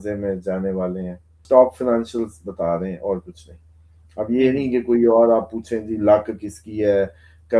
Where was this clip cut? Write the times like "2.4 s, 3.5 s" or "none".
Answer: 1.4 s